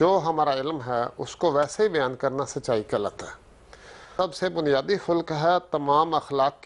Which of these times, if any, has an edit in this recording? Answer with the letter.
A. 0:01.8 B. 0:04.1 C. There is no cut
B